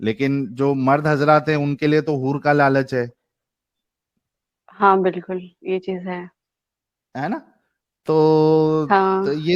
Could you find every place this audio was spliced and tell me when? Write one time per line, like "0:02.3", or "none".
none